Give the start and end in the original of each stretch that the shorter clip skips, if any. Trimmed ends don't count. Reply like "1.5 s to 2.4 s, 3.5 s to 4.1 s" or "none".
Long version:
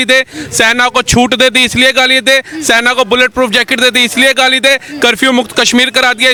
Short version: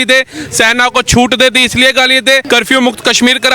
2.4 s to 5.0 s